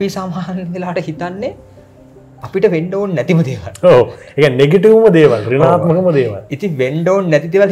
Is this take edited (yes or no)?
no